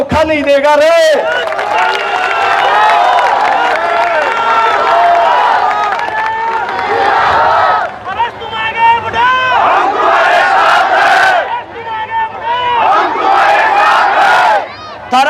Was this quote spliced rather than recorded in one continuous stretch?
no; 0 cuts

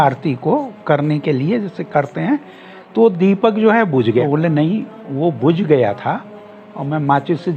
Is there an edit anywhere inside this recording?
yes; 1 cut; at 4.3 s

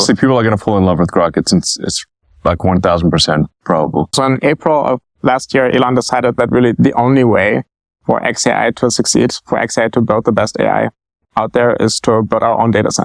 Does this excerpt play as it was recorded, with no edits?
no; 1 cut; at 4.1 s

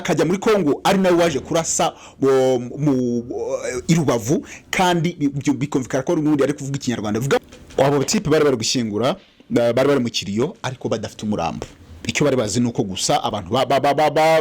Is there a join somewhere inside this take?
yes; 1 cut; at 7.4 s

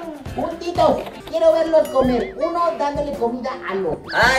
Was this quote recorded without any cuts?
no; 1 cut; at 1.1 s

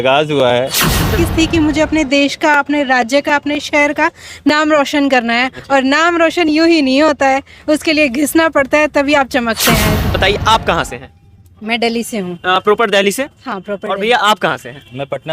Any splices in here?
yes; 2 cuts; at 1.2 s, 10.2 s

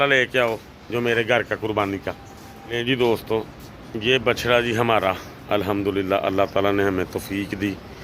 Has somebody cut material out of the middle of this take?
yes; 1 cut; at 2.7 s

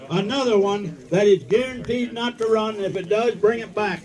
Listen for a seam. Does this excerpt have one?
no; 0 cuts

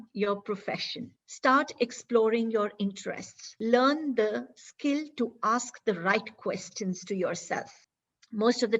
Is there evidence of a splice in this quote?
yes; 3 cuts; at 1.0 s, 3.5 s, 7.8 s

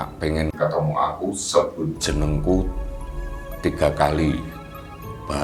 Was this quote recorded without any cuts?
yes; 0 cuts

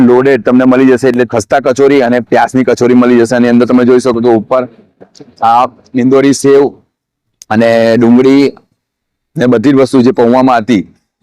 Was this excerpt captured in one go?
no; 1 cut; at 1.3 s

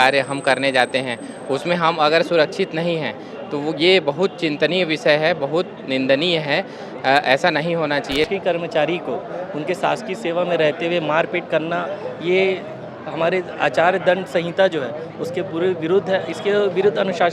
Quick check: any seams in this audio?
yes; 1 cut; at 8.3 s

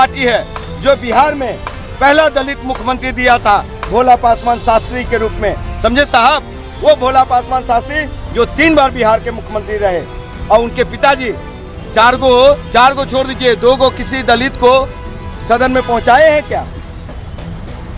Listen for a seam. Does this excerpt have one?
no; 0 cuts

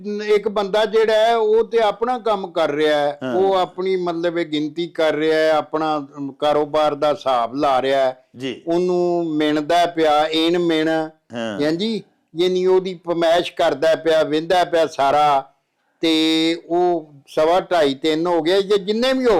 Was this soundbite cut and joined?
no; 0 cuts

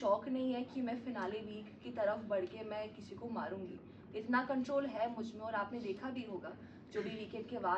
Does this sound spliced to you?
no; 0 cuts

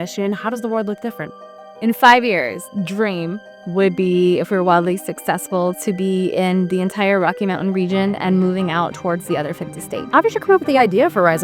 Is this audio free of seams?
no; 2 cuts; at 2.6 s, 10.0 s

